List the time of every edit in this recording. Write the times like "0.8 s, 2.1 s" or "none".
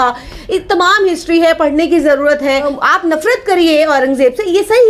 2.7 s